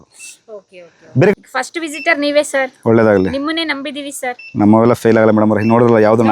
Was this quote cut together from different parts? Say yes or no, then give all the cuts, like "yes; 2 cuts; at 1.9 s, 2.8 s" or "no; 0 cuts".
yes; 1 cut; at 1.3 s